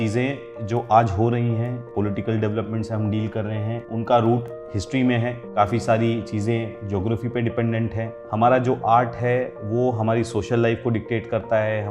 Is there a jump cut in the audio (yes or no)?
yes